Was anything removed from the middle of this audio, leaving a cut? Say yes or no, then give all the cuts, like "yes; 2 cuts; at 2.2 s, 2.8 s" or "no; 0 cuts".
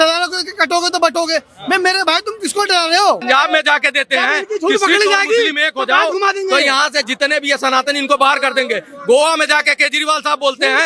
yes; 1 cut; at 3.2 s